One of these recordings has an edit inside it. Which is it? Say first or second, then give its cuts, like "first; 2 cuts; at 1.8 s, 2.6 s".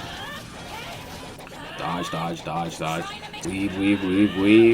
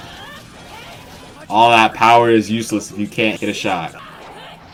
first; 2 cuts; at 1.3 s, 3.3 s